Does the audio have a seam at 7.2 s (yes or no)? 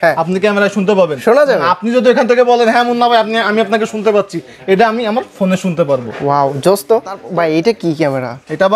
yes